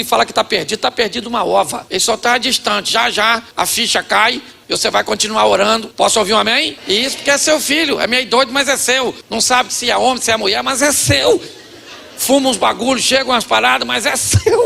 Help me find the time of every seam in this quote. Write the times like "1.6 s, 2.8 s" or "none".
1.8 s, 3.5 s, 4.5 s, 5.9 s, 6.7 s, 9.2 s

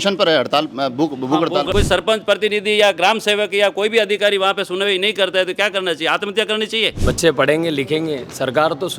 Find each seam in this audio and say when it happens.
1.7 s, 6.9 s

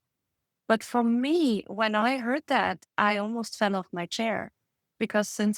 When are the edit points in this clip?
none

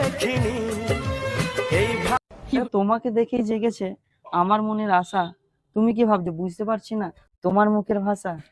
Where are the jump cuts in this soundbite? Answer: 2.6 s

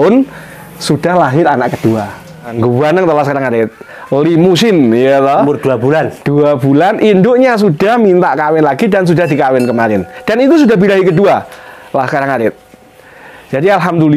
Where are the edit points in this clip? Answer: 2.5 s

